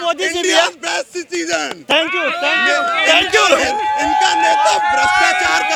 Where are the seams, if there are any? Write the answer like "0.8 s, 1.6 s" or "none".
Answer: none